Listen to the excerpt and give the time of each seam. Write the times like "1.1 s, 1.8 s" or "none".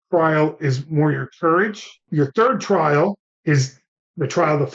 2.0 s, 3.3 s

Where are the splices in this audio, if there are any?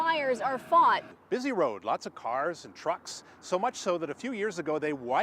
1.1 s

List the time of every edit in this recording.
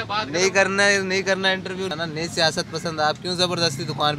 1.9 s

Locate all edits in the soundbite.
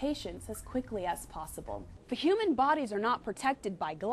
1.9 s

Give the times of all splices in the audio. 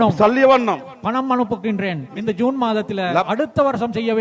2.1 s, 3.2 s

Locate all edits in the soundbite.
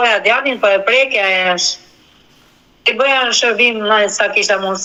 none

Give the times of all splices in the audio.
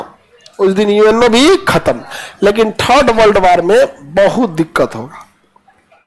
none

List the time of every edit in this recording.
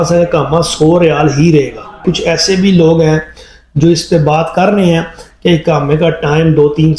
1.9 s

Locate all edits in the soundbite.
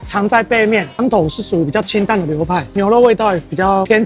0.9 s

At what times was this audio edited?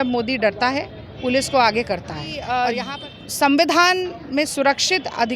2.4 s

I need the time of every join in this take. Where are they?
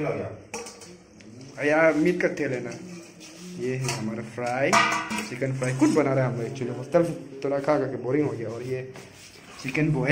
none

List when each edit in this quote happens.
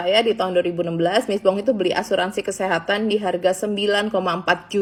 none

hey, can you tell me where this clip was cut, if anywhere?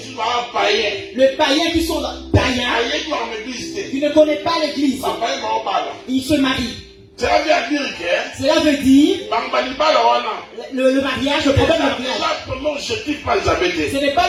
none

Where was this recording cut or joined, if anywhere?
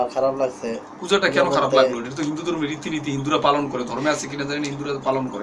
none

